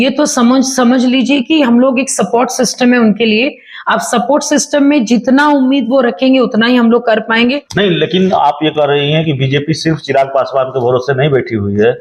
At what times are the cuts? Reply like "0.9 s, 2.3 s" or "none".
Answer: 7.6 s